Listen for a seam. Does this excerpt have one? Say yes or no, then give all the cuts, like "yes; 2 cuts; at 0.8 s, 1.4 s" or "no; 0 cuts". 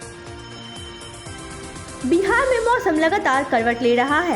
yes; 1 cut; at 1.1 s